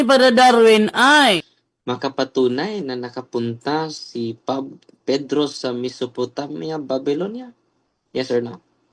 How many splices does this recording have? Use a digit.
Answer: 1